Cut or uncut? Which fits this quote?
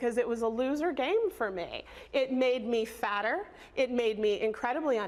uncut